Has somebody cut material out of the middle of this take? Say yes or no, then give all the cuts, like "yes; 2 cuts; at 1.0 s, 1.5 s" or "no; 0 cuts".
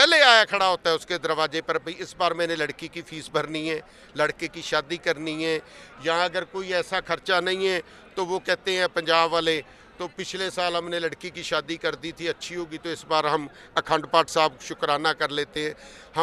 no; 0 cuts